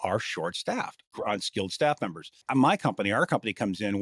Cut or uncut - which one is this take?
cut